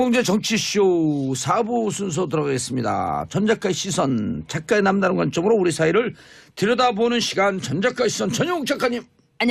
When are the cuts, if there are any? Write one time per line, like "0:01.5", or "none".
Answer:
none